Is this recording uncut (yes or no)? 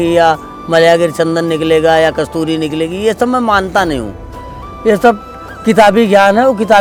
yes